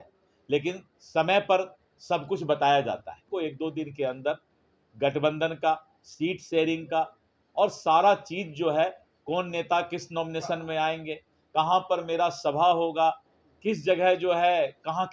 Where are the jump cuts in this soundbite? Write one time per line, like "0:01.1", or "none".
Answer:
0:00.9
0:03.3